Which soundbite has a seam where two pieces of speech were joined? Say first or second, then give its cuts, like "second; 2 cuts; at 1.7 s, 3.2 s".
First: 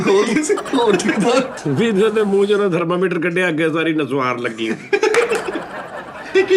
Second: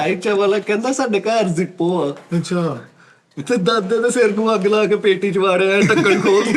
first; 1 cut; at 1.5 s